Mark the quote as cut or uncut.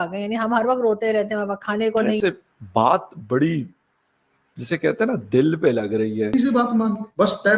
cut